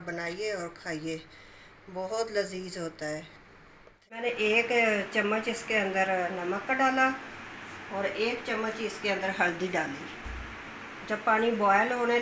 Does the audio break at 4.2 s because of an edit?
yes; 1 cut; at 4.2 s

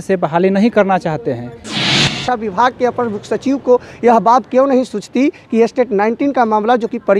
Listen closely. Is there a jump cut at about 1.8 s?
yes; 1 cut; at 1.8 s

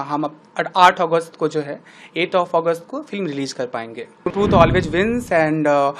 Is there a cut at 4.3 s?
yes; 1 cut; at 4.3 s

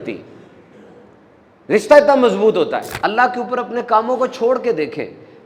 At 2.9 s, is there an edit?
yes; 1 cut; at 2.9 s

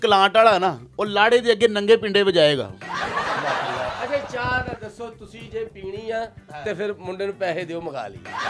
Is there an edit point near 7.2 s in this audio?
no; 1 cut; at 4.0 s

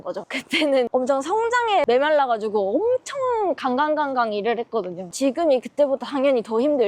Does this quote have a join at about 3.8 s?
no; 3 cuts; at 0.7 s, 1.8 s, 5.2 s

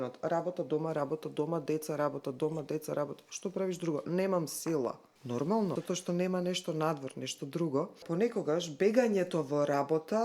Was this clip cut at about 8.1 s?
yes; 3 cuts; at 5.1 s, 5.8 s, 8.1 s

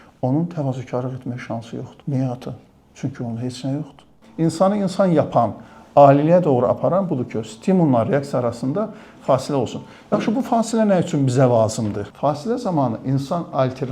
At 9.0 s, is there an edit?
no; 3 cuts; at 1.9 s, 4.2 s, 12.1 s

